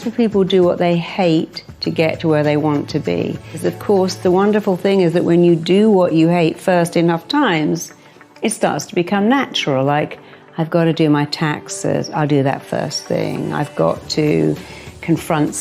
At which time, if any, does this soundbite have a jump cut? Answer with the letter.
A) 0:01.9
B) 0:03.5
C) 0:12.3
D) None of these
B